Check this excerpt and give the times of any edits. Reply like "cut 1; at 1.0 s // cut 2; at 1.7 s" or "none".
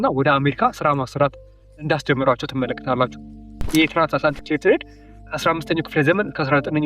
cut 1; at 3.7 s